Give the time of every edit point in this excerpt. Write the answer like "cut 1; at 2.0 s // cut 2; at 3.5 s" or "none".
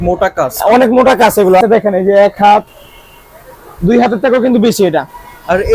cut 1; at 1.6 s